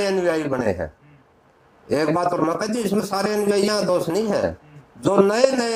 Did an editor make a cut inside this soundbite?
no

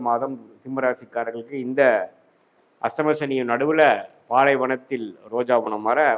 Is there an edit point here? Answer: no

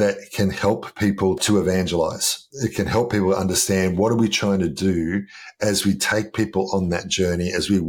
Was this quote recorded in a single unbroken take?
no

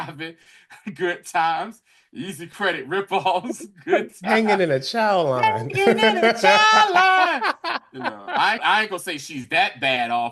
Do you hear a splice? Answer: yes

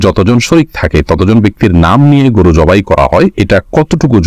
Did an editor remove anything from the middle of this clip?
yes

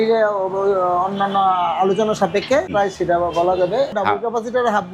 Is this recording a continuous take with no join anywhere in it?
no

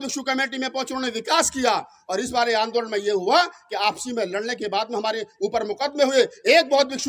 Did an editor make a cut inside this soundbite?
no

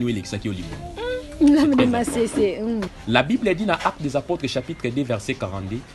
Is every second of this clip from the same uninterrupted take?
no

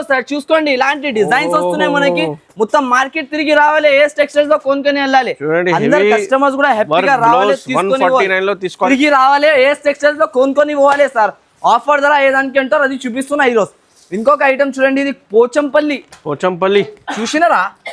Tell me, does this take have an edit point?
yes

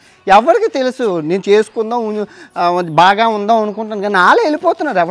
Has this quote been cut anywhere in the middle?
no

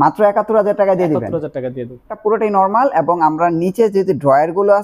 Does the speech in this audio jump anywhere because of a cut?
yes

